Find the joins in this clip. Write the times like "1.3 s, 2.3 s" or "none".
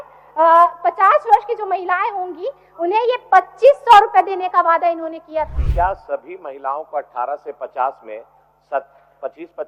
5.6 s